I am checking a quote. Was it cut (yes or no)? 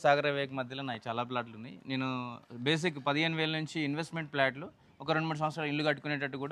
no